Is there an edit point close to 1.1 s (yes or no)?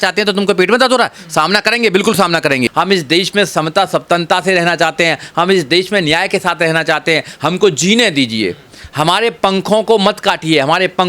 no